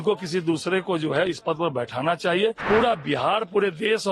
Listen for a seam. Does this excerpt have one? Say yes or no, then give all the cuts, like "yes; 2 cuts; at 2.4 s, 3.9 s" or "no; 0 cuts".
yes; 1 cut; at 2.6 s